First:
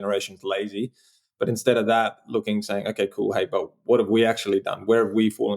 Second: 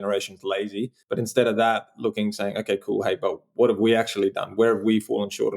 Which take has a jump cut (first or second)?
second